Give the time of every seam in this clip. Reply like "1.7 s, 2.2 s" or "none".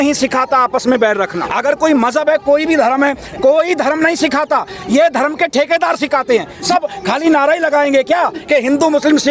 1.4 s, 6.6 s